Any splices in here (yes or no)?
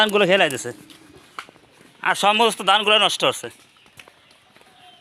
no